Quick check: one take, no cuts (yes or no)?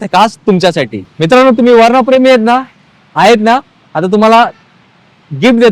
no